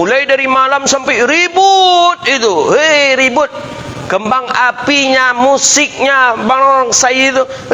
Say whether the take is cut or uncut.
uncut